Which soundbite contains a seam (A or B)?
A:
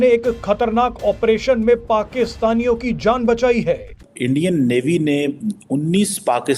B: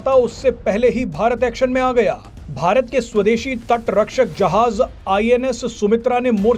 A